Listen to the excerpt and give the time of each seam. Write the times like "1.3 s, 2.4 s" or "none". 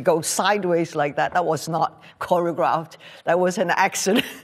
none